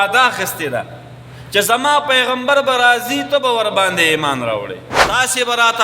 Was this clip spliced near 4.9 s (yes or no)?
yes